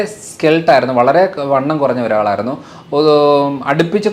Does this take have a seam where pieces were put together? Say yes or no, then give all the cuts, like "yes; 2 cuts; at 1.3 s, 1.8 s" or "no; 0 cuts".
no; 0 cuts